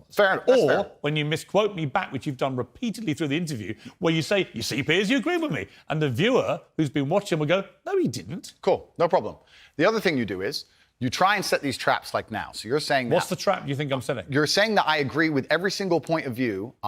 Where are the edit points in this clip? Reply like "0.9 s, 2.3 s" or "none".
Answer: 10.4 s